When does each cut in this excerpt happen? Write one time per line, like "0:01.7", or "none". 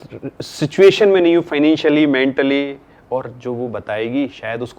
none